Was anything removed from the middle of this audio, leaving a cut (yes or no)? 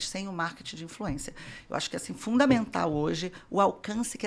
no